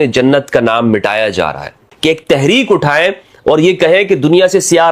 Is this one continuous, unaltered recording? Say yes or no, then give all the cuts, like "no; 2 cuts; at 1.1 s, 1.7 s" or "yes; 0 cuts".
no; 1 cut; at 1.9 s